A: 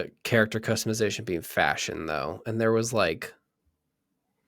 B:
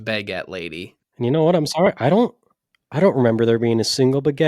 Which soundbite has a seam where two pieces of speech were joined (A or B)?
B